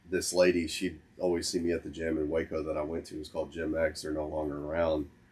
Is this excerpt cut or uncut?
uncut